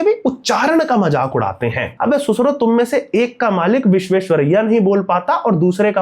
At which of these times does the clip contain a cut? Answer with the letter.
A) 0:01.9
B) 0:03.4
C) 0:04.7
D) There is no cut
A